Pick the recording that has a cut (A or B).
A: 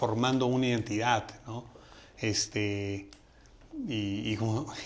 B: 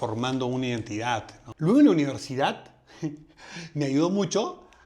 B